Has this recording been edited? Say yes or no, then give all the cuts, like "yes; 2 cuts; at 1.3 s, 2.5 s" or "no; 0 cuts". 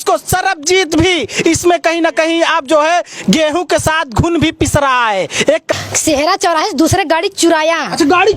yes; 1 cut; at 5.7 s